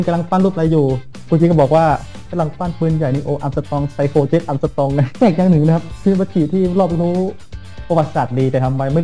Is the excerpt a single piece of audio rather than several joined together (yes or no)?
no